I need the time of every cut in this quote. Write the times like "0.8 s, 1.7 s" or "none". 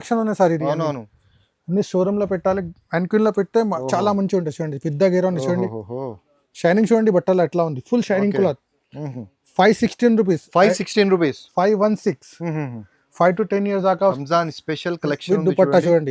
14.2 s